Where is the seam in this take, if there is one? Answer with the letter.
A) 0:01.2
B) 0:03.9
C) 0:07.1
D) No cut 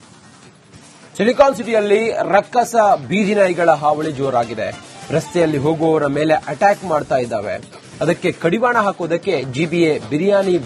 A